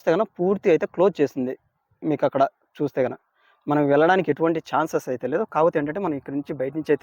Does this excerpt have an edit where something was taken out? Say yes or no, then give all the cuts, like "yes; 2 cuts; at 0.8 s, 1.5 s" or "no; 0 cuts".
no; 0 cuts